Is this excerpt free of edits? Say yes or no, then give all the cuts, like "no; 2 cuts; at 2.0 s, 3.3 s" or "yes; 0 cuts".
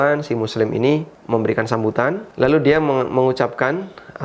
no; 2 cuts; at 1.1 s, 2.3 s